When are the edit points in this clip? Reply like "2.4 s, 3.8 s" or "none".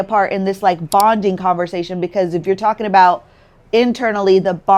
none